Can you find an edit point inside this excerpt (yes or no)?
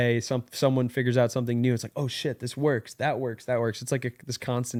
no